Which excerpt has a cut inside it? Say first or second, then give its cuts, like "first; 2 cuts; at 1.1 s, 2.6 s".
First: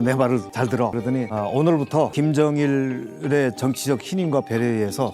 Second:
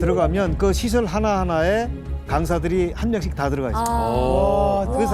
first; 2 cuts; at 0.9 s, 2.1 s